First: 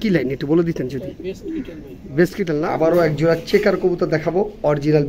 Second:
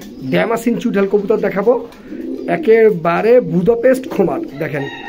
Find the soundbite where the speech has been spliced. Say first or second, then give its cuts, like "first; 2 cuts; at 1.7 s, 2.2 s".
first; 1 cut; at 2.7 s